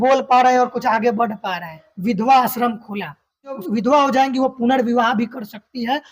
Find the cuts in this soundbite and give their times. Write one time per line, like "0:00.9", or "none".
0:01.9
0:03.6